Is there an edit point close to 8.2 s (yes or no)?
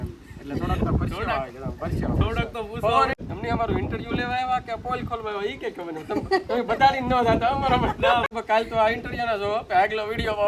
yes